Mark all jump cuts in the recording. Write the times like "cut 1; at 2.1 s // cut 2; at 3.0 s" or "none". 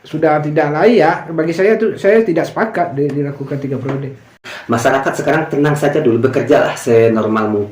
cut 1; at 4.5 s